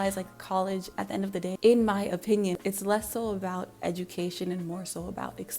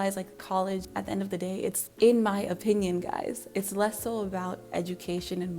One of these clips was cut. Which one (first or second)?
first